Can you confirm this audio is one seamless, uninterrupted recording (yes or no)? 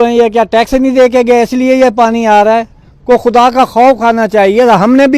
yes